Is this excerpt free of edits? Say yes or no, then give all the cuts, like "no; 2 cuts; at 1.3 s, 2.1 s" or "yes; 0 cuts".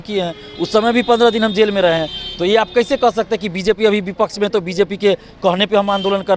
yes; 0 cuts